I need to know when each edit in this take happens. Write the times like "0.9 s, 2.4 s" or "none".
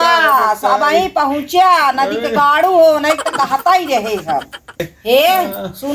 4.8 s